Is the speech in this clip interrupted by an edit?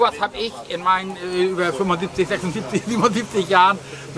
no; 0 cuts

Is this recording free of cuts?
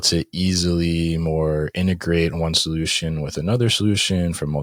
yes; 0 cuts

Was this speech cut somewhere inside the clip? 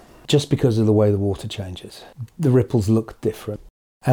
no; 0 cuts

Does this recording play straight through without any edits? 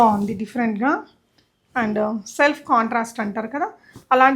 yes; 0 cuts

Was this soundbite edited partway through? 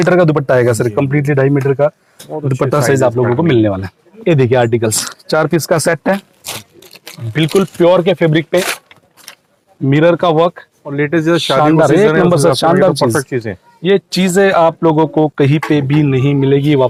no; 0 cuts

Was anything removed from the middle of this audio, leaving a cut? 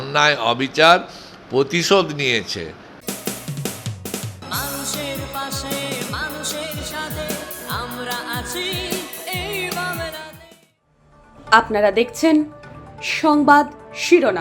yes; 1 cut; at 3.0 s

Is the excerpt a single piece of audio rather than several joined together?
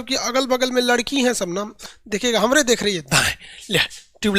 no; 1 cut; at 1.7 s

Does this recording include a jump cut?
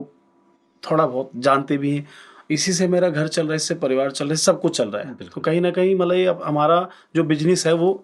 no; 0 cuts

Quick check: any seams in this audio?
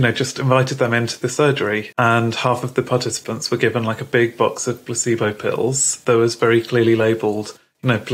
yes; 1 cut; at 1.9 s

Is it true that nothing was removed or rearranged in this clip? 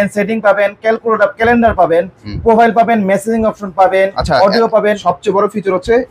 yes; 0 cuts

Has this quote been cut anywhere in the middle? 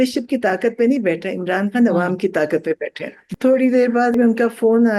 yes; 2 cuts; at 3.3 s, 4.1 s

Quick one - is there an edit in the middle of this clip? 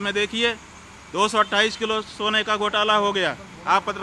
no; 0 cuts

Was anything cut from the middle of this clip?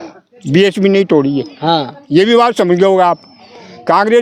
no; 0 cuts

